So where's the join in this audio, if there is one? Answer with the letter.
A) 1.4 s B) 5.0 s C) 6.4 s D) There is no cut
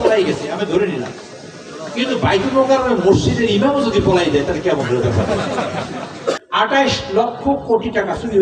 C